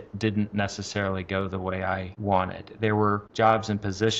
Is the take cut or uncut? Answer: cut